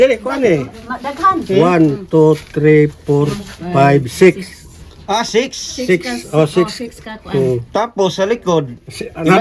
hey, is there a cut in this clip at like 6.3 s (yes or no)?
no